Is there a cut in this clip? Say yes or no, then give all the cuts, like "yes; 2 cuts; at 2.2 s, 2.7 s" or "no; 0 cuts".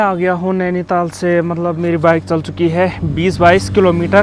no; 0 cuts